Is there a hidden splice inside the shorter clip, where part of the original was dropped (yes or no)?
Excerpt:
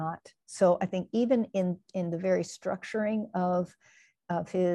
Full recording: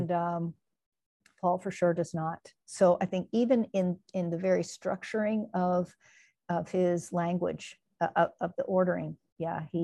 no